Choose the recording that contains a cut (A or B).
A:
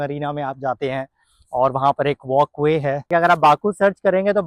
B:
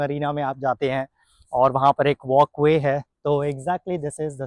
A